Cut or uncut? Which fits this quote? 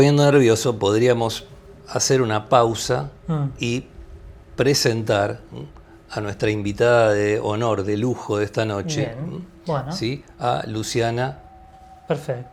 uncut